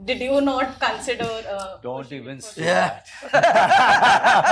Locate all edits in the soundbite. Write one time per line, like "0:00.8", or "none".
none